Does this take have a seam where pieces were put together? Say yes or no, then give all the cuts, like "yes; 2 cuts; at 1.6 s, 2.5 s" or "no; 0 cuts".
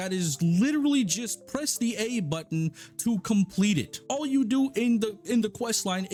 no; 0 cuts